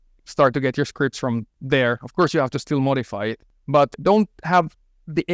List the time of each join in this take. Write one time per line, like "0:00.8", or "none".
0:01.5
0:03.9